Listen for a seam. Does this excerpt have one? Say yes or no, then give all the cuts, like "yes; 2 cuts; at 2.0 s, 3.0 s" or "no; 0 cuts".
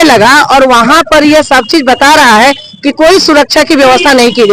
no; 0 cuts